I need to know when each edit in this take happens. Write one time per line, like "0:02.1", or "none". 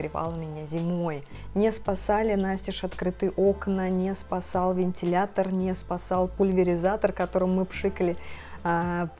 0:01.3